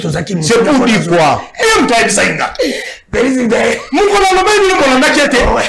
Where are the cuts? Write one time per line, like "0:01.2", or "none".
0:01.6